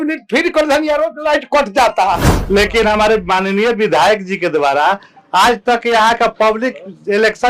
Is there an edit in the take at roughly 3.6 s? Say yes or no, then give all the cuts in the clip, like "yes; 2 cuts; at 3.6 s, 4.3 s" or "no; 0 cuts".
no; 1 cut; at 2.3 s